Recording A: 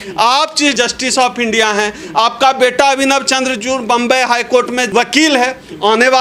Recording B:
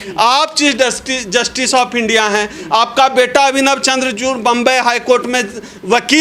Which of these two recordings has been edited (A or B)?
A